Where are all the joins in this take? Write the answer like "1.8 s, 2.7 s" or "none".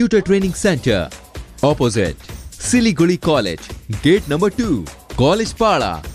none